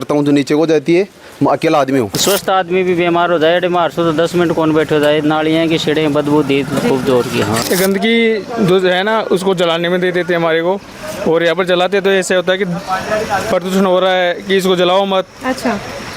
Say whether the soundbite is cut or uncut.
cut